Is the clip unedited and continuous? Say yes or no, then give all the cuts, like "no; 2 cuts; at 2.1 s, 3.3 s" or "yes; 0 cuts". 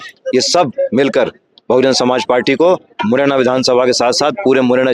yes; 0 cuts